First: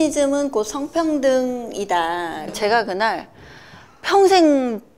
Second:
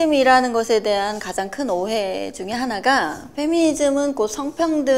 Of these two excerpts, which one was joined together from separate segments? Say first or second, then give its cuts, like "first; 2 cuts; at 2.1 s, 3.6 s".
first; 1 cut; at 2.5 s